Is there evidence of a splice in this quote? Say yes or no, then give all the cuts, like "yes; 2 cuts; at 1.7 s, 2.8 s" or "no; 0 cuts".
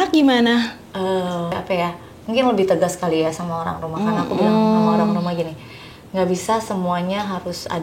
yes; 1 cut; at 1.6 s